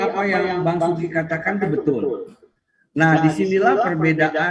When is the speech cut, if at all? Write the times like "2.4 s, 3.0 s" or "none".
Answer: none